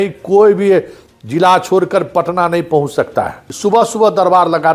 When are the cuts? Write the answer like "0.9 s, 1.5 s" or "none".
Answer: 3.4 s